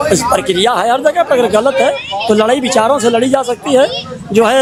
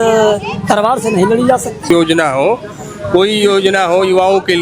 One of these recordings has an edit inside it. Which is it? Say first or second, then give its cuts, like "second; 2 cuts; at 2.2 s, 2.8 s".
second; 1 cut; at 1.9 s